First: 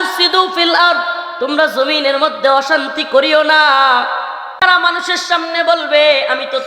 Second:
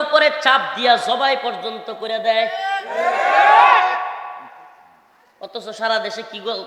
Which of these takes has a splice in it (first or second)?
first